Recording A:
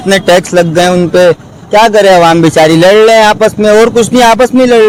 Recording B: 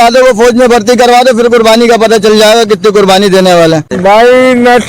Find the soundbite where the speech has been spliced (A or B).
B